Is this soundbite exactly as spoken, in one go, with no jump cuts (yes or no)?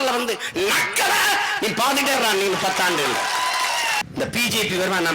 no